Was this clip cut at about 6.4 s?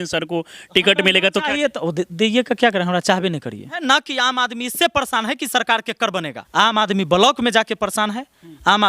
yes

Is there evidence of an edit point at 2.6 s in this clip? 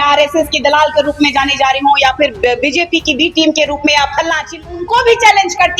no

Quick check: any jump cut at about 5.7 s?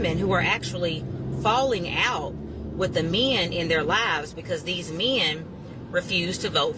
no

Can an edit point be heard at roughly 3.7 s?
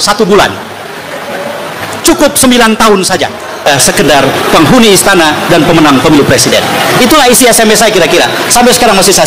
yes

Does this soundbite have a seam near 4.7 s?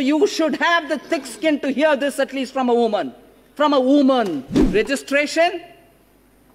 yes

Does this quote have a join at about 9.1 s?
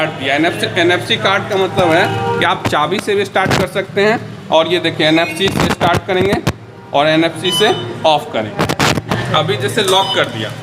yes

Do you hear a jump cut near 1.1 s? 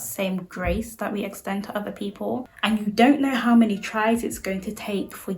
no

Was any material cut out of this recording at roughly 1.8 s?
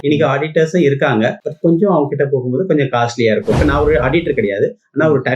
no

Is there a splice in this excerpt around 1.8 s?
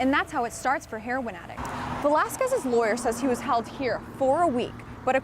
yes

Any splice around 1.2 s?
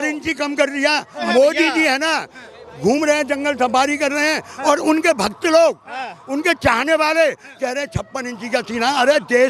yes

